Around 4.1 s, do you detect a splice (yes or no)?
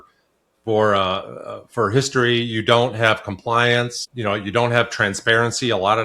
yes